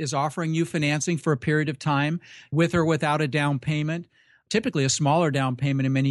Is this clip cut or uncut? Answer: cut